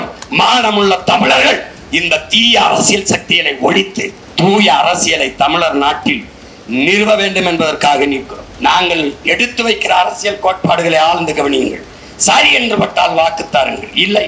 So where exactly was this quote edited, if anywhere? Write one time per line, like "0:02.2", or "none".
0:04.2
0:08.4

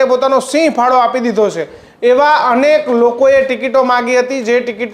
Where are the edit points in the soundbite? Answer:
none

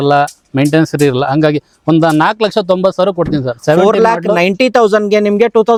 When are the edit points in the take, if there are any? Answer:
none

